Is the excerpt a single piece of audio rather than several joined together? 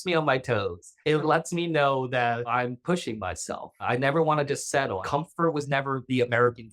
no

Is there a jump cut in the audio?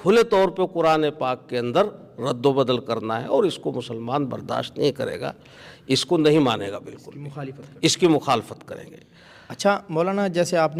no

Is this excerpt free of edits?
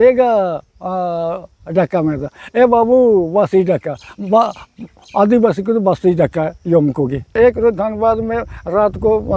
no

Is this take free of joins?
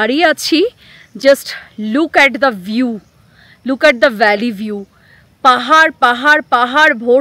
yes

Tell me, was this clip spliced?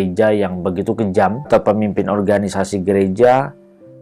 yes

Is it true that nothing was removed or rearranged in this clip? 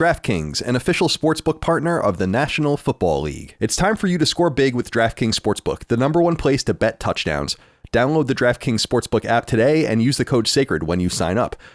no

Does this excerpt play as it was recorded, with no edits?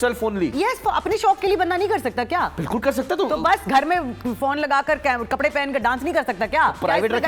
yes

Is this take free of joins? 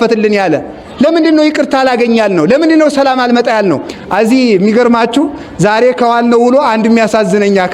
no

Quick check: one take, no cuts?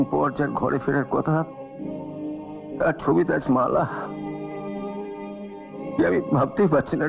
yes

